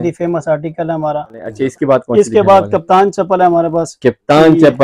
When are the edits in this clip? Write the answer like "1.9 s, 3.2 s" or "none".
1.5 s